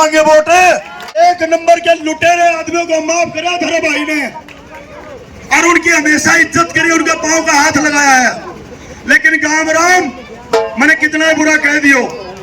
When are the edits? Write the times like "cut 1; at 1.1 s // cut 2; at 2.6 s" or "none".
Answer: cut 1; at 1.0 s